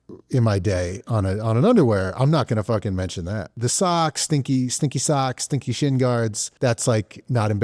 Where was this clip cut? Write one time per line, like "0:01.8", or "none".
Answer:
0:03.5